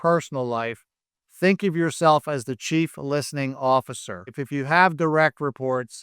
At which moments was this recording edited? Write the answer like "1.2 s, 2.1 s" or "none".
4.4 s